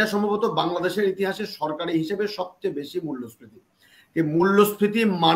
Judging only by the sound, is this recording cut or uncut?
uncut